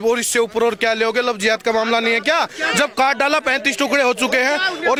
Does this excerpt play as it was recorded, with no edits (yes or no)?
yes